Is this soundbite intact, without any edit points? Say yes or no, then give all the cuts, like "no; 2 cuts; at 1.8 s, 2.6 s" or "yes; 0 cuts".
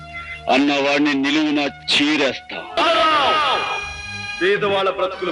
no; 1 cut; at 2.8 s